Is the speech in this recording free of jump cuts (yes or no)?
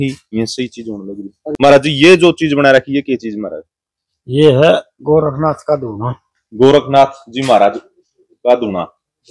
yes